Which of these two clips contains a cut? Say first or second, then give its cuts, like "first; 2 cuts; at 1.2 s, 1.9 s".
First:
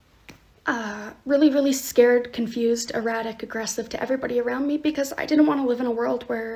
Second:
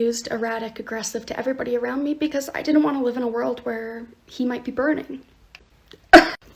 second; 1 cut; at 5.4 s